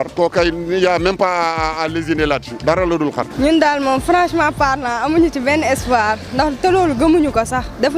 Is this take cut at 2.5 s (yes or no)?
yes